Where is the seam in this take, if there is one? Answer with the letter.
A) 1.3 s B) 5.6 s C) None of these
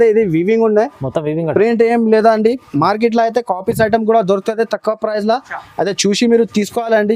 C